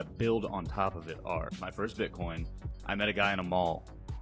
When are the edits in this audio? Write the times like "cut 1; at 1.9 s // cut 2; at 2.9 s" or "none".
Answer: cut 1; at 1.6 s